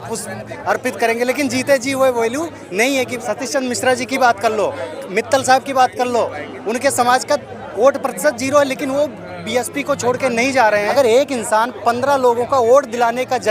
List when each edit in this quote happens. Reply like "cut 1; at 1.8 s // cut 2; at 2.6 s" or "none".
cut 1; at 3.2 s // cut 2; at 10.9 s